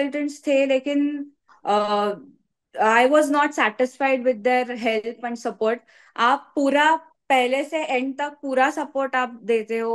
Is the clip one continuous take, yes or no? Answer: yes